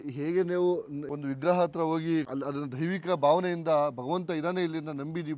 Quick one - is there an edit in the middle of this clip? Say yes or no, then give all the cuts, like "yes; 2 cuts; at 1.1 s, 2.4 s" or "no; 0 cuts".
yes; 2 cuts; at 1.0 s, 2.3 s